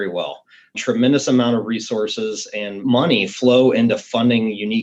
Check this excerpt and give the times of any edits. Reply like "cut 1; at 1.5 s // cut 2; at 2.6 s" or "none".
cut 1; at 2.7 s